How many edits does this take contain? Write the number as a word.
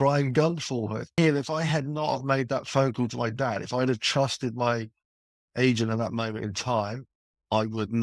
one